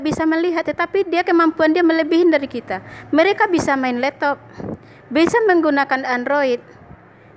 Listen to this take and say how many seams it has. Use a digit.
0